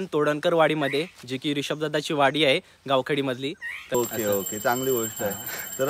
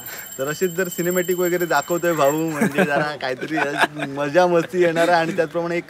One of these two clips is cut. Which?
first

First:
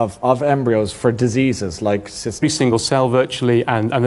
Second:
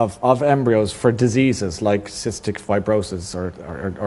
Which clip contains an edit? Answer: second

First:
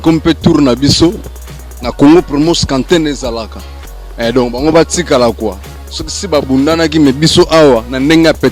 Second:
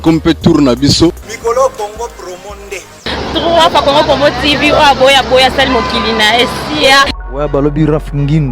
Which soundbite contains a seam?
second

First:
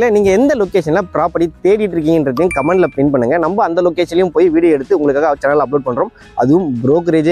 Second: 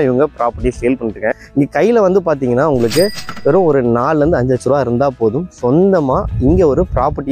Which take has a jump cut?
second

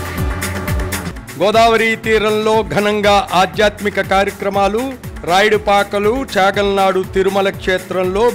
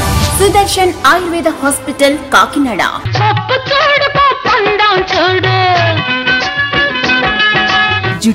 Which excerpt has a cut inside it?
first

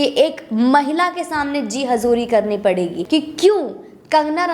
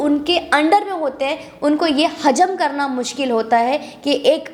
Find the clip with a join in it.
first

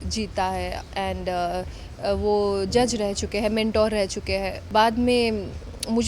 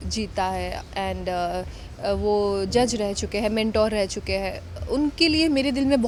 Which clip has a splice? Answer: first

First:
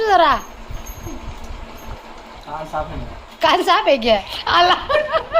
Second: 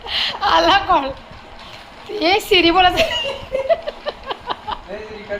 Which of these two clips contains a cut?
first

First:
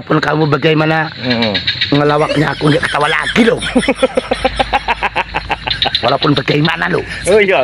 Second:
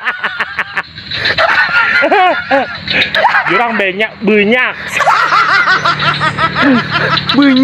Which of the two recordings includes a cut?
second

